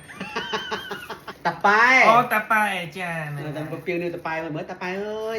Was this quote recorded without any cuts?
no; 1 cut; at 1.3 s

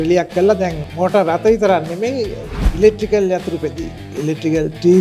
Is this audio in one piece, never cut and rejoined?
no; 1 cut; at 4.0 s

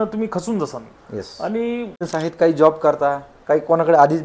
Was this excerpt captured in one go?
no; 1 cut; at 2.1 s

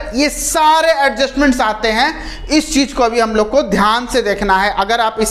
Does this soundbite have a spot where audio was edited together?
no; 0 cuts

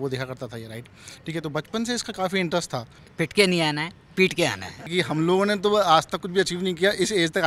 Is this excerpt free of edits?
no; 2 cuts; at 3.0 s, 4.9 s

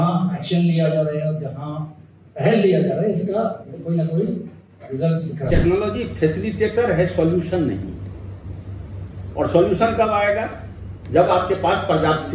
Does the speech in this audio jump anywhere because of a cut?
yes; 1 cut; at 5.5 s

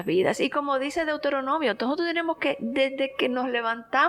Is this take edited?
no; 0 cuts

